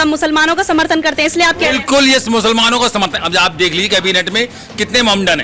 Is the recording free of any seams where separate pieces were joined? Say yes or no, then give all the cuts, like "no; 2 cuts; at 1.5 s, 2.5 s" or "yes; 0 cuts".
yes; 0 cuts